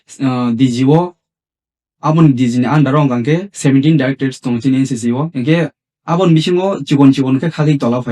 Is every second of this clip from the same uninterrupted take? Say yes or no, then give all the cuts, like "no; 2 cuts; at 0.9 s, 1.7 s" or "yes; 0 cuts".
no; 1 cut; at 5.3 s